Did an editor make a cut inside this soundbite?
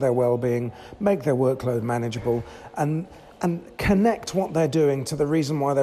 no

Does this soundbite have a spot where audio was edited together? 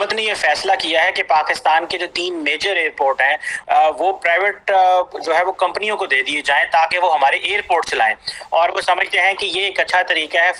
no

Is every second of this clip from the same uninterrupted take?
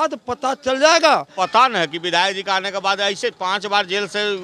no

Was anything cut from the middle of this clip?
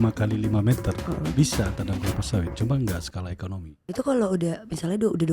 yes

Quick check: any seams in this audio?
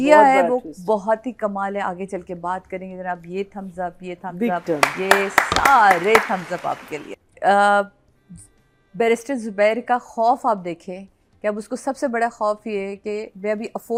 no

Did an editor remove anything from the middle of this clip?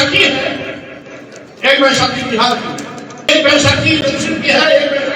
yes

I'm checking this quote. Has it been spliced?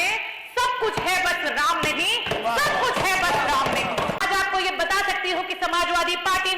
yes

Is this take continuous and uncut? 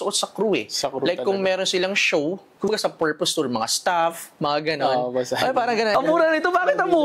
no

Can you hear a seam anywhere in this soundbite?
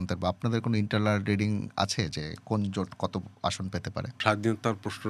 yes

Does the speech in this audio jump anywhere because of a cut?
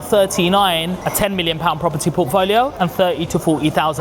yes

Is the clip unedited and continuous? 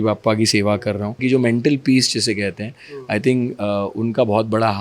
no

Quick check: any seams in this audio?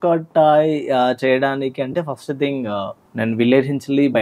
yes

